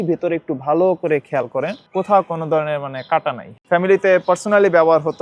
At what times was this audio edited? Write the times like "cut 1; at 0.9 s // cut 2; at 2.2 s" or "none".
cut 1; at 1.8 s // cut 2; at 3.5 s